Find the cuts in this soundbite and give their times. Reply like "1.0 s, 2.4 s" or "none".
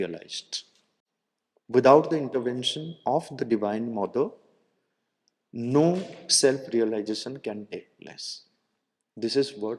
none

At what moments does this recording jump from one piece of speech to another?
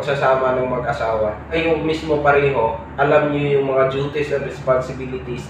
1.5 s

